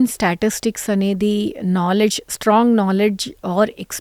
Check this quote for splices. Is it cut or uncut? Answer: uncut